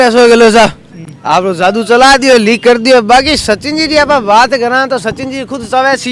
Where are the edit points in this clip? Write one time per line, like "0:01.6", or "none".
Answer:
none